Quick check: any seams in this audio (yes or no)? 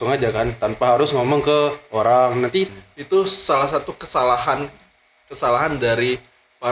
yes